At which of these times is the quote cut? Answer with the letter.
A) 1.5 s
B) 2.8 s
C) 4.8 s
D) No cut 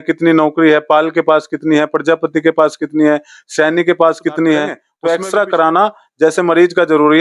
C